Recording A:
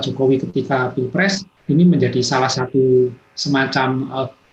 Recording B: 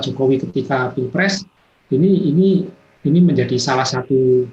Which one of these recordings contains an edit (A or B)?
A